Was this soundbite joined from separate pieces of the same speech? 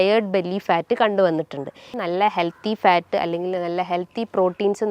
yes; 1 cut; at 1.9 s

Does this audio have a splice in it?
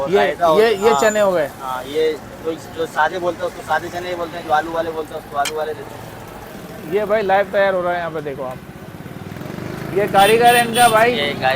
yes; 1 cut; at 6.5 s

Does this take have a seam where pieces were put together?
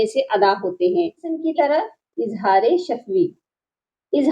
yes; 1 cut; at 1.4 s

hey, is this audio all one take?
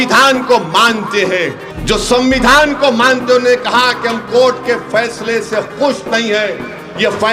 no; 1 cut; at 1.7 s

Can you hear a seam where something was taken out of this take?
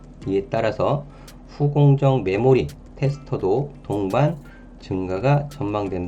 no; 0 cuts

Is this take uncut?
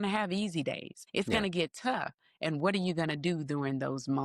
no; 1 cut; at 0.9 s

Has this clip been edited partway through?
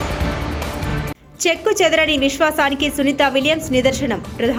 no; 0 cuts

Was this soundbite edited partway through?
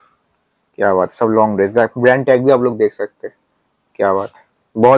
no; 0 cuts

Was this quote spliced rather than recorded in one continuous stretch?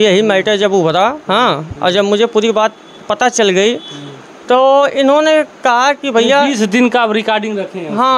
no; 0 cuts

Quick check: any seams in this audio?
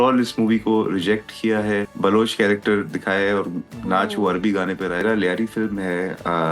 yes; 2 cuts; at 1.9 s, 5.0 s

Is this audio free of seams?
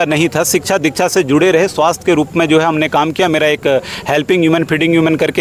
yes; 0 cuts

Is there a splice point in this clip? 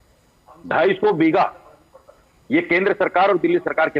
no; 0 cuts

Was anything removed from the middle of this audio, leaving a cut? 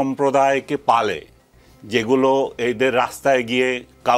no; 0 cuts

